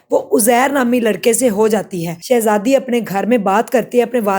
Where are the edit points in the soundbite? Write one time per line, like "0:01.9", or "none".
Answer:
0:02.1